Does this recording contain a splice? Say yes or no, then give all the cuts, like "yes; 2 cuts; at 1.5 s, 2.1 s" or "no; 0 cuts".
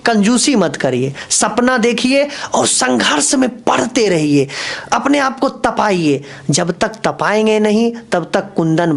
no; 0 cuts